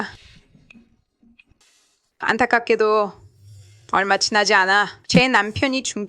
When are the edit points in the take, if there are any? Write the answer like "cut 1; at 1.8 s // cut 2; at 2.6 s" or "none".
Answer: cut 1; at 1.6 s